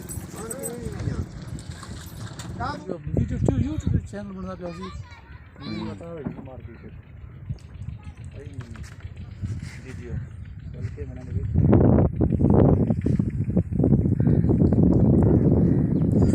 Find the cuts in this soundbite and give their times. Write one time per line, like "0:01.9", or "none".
0:02.8